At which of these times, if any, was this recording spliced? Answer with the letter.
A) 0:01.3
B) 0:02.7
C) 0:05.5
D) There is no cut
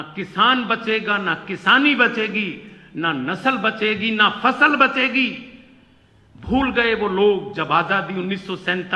D